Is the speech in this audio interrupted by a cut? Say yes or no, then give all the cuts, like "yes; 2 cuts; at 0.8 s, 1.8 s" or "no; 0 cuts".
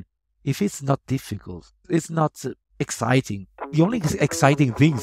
yes; 2 cuts; at 1.8 s, 3.6 s